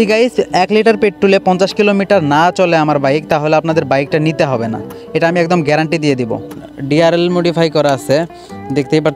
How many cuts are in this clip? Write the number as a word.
one